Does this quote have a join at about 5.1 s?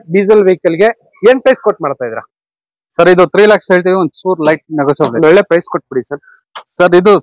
yes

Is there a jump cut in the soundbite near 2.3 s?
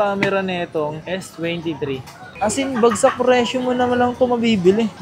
yes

